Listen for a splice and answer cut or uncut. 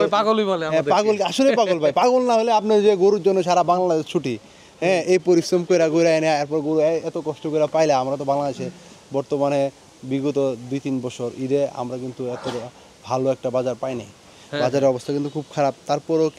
uncut